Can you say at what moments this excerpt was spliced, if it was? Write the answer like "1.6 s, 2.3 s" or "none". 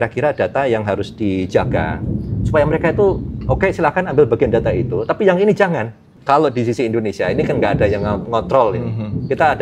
6.1 s